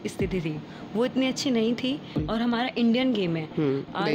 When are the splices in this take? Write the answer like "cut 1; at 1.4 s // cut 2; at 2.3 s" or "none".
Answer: cut 1; at 2.1 s